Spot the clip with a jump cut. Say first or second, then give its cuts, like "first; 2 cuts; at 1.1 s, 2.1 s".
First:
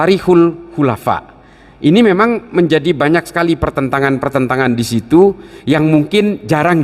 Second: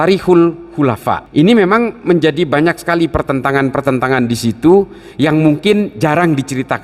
second; 1 cut; at 1.1 s